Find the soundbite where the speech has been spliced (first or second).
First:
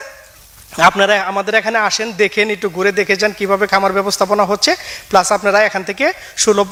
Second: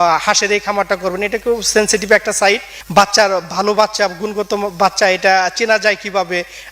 second